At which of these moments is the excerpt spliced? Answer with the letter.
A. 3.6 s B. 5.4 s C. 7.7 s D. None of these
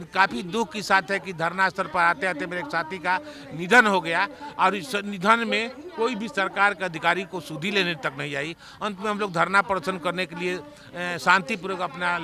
D